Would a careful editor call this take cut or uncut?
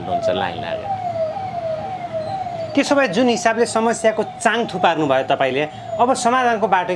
uncut